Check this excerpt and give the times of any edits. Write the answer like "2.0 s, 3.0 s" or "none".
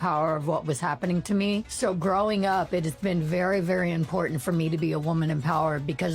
1.7 s